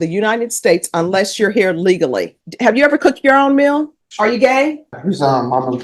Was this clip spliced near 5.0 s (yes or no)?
yes